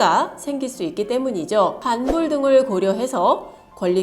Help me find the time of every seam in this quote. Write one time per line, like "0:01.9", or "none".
0:01.8